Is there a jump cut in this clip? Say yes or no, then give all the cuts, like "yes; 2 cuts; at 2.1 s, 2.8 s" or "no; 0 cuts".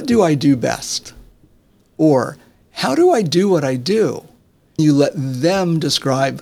yes; 1 cut; at 4.8 s